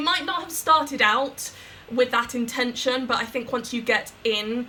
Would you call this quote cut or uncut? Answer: uncut